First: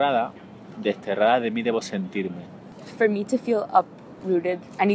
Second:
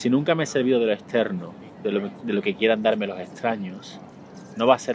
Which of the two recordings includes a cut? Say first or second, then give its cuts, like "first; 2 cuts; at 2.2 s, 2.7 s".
first; 1 cut; at 2.8 s